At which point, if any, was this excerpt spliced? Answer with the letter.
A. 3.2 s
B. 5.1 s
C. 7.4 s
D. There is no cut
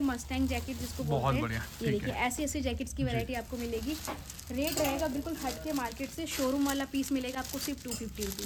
D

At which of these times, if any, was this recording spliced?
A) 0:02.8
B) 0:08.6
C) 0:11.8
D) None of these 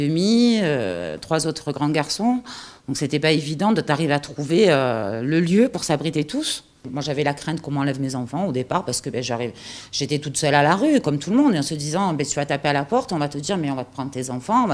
C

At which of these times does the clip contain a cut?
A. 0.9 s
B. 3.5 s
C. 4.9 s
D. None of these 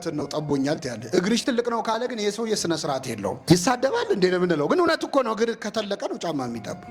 B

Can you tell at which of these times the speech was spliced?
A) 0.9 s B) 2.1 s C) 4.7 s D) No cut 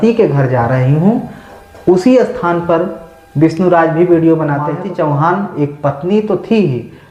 C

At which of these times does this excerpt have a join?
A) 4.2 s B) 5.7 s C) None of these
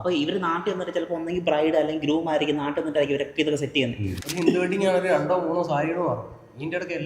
A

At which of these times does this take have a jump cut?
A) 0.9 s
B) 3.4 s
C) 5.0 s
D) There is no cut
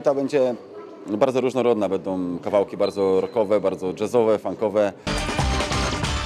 C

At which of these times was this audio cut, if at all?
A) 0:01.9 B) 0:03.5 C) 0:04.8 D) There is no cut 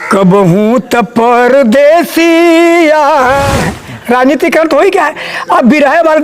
B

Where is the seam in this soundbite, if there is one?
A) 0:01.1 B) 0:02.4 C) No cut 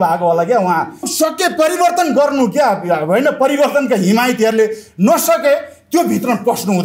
A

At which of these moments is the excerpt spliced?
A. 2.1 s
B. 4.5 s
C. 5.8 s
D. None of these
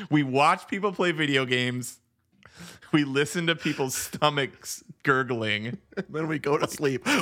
C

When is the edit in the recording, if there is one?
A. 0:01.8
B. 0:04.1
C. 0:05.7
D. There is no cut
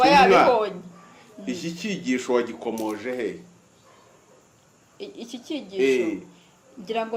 D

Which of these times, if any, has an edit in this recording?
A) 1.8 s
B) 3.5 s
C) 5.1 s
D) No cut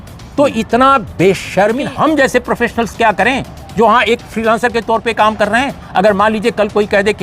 A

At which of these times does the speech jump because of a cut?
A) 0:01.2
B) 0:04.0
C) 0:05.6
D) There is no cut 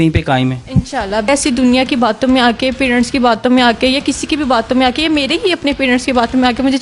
A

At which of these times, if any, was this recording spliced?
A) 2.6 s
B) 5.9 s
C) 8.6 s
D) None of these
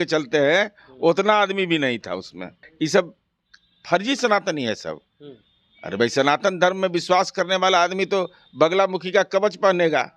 A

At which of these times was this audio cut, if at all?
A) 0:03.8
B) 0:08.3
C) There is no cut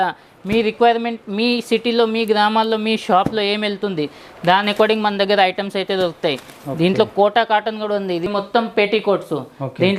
B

